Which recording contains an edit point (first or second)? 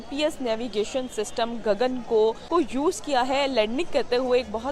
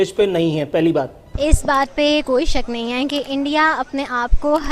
second